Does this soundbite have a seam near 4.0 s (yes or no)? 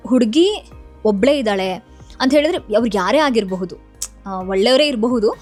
no